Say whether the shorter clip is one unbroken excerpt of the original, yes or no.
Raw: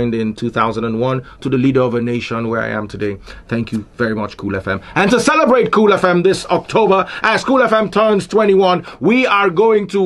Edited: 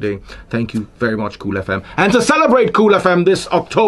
yes